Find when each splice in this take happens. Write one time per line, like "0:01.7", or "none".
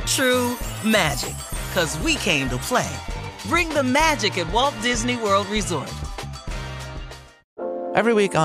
0:07.5